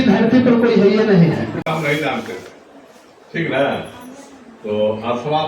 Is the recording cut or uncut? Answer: cut